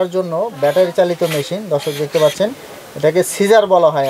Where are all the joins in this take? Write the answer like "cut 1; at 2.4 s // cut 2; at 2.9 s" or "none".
none